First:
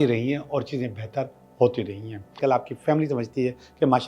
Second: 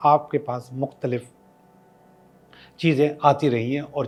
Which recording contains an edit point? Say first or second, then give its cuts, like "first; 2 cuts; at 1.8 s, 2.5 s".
first; 1 cut; at 2.4 s